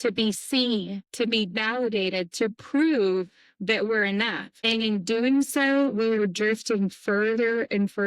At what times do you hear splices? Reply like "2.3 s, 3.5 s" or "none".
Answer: 1.0 s, 4.5 s